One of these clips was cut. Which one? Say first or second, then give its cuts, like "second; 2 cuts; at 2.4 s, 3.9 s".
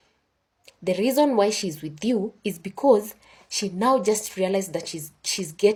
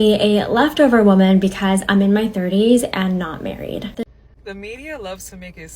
second; 1 cut; at 4.1 s